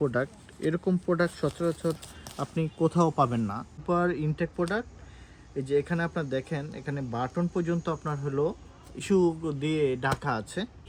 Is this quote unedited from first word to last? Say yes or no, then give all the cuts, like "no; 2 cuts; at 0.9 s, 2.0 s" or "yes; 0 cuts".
no; 2 cuts; at 3.8 s, 9.0 s